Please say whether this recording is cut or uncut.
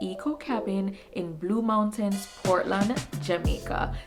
uncut